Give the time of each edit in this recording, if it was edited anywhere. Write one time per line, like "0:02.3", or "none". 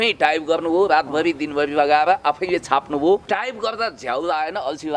0:03.2